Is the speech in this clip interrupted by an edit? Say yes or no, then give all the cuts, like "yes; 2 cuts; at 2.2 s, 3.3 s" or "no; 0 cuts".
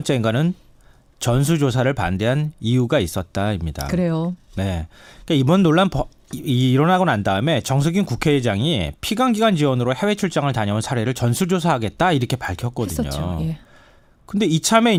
no; 0 cuts